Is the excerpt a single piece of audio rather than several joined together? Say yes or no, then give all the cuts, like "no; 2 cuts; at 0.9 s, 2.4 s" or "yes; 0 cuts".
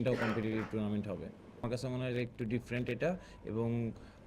no; 1 cut; at 1.6 s